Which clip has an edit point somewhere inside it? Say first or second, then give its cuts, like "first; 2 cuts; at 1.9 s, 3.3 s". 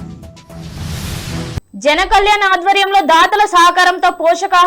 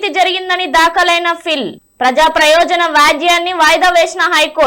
first; 1 cut; at 1.6 s